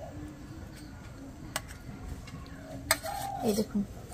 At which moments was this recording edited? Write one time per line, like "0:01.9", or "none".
0:02.7